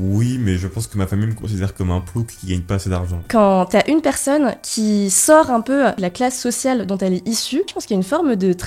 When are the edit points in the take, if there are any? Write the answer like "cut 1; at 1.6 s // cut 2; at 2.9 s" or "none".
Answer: cut 1; at 3.2 s // cut 2; at 6.0 s // cut 3; at 7.8 s